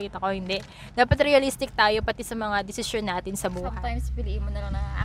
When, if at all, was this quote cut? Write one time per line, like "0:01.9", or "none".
0:03.7